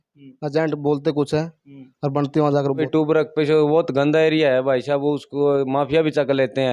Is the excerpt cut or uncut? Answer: cut